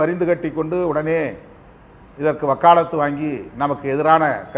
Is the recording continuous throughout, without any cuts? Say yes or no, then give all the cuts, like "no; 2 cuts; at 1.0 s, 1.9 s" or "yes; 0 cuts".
yes; 0 cuts